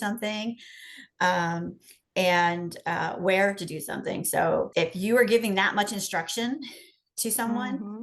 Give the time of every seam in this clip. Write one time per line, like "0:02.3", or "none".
0:04.7